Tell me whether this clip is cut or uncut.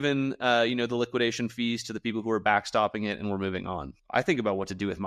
cut